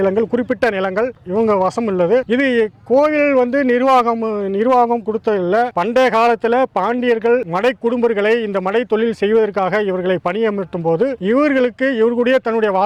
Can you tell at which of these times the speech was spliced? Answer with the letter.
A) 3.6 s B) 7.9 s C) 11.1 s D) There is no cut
D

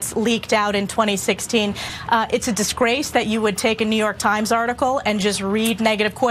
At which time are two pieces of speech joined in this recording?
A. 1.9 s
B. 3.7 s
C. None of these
A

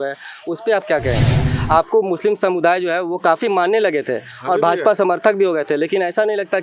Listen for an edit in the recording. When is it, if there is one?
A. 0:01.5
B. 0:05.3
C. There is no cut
A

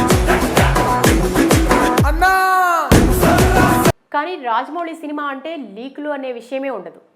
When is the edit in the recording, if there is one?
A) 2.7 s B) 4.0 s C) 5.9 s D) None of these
B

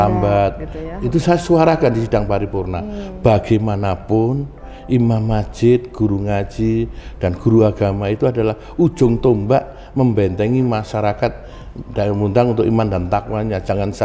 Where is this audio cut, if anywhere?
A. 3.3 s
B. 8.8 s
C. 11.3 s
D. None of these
D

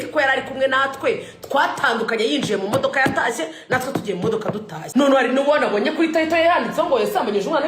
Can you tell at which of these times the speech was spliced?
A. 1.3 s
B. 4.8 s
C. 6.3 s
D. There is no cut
B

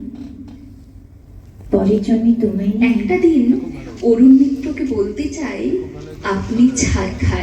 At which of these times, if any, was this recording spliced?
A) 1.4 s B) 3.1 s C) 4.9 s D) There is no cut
B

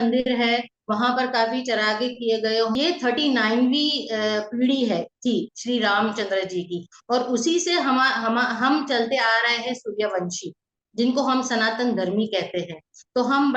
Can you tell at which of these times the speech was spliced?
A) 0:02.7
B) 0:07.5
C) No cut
A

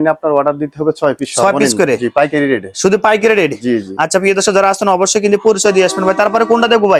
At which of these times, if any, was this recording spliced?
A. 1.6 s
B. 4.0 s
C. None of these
C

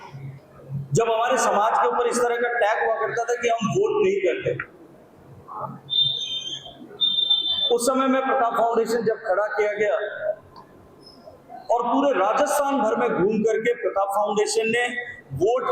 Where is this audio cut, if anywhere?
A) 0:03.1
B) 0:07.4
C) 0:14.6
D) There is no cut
D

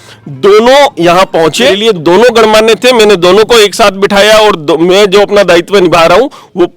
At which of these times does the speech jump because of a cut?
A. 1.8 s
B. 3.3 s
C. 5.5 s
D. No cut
A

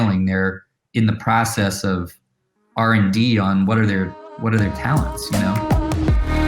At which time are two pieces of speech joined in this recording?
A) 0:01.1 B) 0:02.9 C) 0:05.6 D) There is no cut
C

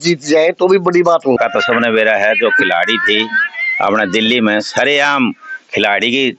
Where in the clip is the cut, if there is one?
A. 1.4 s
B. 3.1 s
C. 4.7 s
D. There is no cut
A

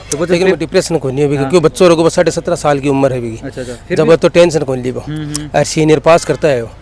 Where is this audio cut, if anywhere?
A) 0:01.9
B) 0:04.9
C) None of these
C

